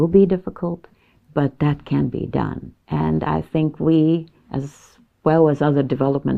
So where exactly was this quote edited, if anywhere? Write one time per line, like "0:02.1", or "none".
none